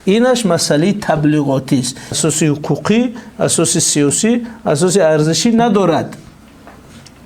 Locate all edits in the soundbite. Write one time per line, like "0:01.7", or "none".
0:02.2